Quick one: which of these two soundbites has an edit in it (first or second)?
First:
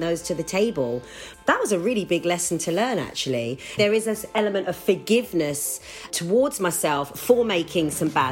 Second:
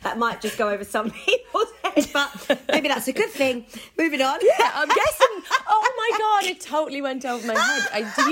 first